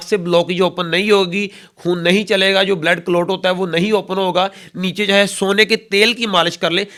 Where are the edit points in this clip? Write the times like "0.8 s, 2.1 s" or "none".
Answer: none